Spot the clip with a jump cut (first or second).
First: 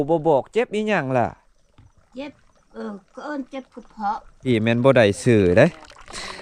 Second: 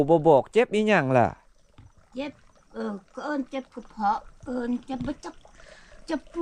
first